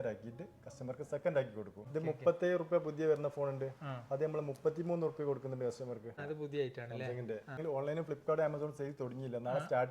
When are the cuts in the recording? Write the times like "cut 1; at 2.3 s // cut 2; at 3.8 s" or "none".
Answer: cut 1; at 1.8 s // cut 2; at 6.2 s // cut 3; at 7.6 s